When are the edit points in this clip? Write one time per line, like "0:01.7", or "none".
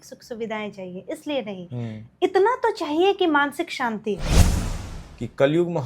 0:04.5

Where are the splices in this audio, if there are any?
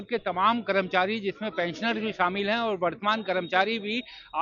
none

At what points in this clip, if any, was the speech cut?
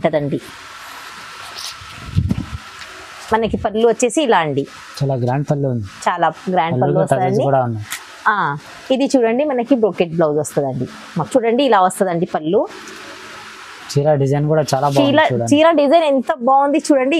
0:11.3

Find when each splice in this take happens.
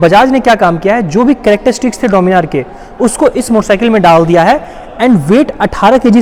none

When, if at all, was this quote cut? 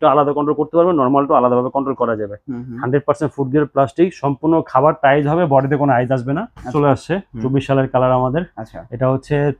0:06.7

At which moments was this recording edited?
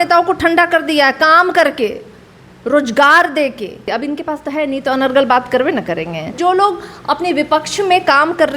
0:03.9
0:06.4

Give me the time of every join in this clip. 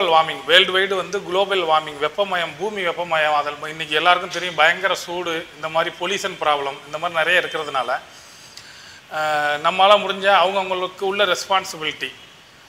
none

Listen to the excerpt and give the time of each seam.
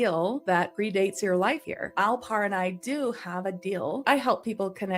0:01.9
0:04.0

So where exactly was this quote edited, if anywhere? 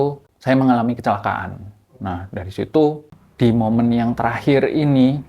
0:03.0

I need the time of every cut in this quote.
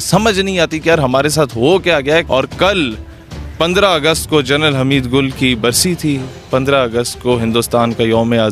0:02.3

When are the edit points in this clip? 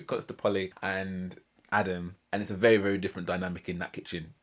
0:01.2
0:02.2

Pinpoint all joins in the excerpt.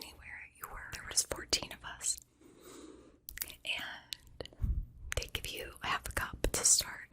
0:01.1

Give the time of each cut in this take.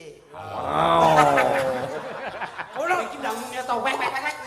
0:03.2

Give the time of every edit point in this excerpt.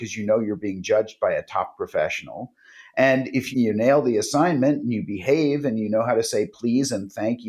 0:03.5

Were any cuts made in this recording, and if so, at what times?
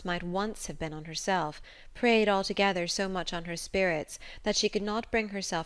0:03.3

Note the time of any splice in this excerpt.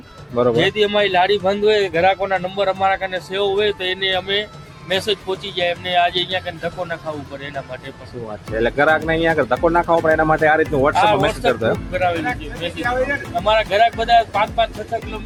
none

